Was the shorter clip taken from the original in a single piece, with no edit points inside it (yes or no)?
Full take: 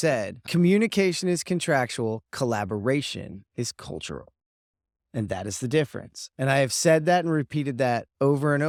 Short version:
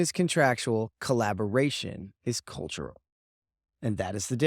yes